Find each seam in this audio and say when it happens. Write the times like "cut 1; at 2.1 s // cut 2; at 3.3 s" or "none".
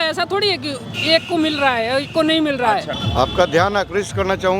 none